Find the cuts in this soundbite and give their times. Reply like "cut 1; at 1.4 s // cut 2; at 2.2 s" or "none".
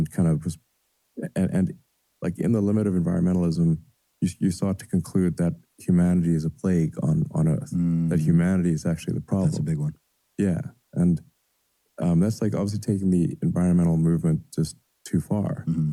none

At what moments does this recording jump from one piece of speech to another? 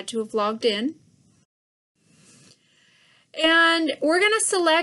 cut 1; at 2.7 s

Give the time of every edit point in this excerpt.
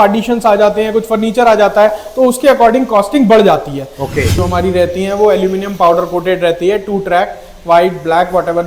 cut 1; at 4.3 s

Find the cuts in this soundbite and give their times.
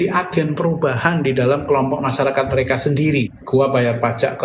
cut 1; at 3.4 s

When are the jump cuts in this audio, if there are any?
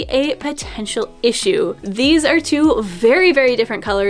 cut 1; at 1.8 s

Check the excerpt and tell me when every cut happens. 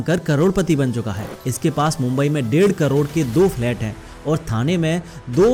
none

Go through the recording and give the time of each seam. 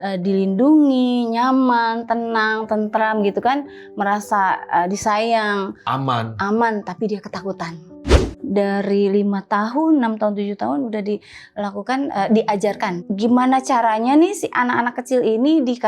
cut 1; at 8.3 s

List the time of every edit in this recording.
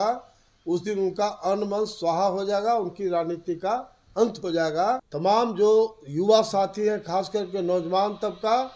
cut 1; at 5.1 s

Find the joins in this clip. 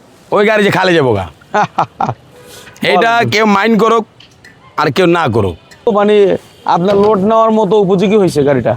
cut 1; at 5.9 s

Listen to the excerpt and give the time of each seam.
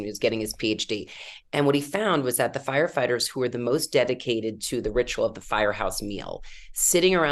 none

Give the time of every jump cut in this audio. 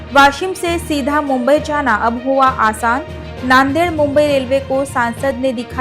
none

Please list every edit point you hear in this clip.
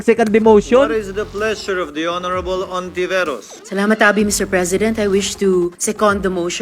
none

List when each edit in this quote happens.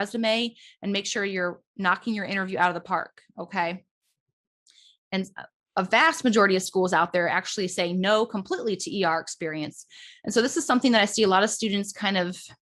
none

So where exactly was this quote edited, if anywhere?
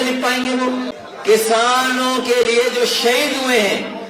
cut 1; at 1.0 s

